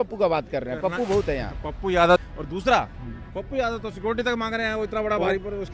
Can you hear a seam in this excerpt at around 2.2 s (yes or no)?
yes